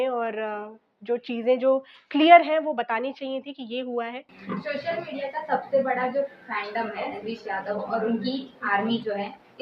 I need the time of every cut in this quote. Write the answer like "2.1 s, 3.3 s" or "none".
4.3 s